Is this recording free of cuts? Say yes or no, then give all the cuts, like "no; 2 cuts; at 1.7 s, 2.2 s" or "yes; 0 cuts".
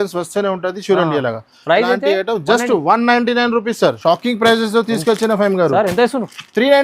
no; 1 cut; at 3.9 s